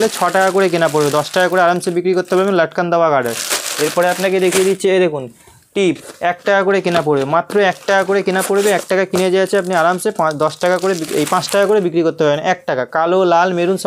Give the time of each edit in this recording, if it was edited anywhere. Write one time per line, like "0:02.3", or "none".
none